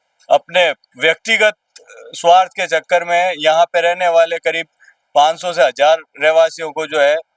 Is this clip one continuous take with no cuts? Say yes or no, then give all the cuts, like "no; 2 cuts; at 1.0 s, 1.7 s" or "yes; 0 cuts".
yes; 0 cuts